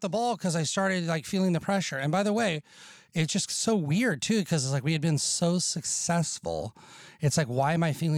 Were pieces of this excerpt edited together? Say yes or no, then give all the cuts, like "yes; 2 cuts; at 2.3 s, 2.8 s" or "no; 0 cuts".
no; 0 cuts